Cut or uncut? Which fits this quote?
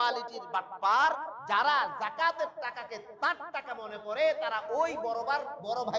uncut